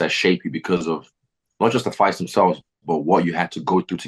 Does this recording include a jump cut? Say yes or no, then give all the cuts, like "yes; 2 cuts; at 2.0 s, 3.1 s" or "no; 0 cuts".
no; 0 cuts